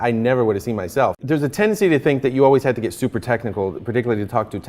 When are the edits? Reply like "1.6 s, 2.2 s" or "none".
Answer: 1.2 s